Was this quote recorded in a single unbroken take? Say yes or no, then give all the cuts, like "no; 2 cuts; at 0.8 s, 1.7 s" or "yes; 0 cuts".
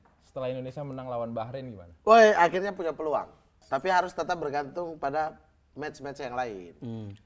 no; 1 cut; at 3.6 s